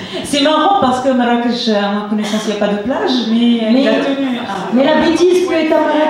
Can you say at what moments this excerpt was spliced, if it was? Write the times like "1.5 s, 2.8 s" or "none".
none